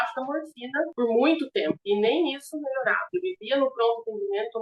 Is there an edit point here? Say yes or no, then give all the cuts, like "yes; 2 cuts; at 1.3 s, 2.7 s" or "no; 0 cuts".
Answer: yes; 3 cuts; at 0.9 s, 1.8 s, 3.1 s